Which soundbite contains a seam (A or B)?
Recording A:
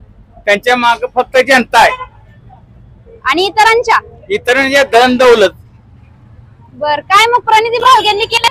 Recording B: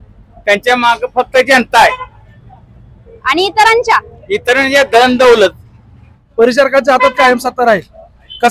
B